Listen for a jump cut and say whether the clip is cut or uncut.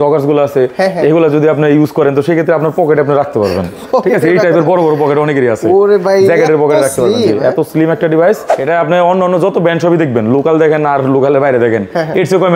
cut